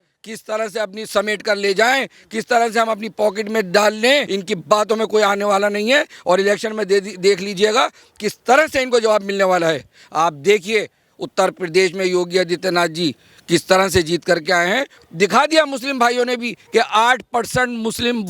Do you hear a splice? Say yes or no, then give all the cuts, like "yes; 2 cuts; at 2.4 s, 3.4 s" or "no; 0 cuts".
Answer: yes; 3 cuts; at 4.3 s, 10.0 s, 14.9 s